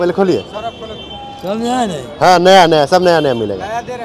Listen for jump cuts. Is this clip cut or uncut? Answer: uncut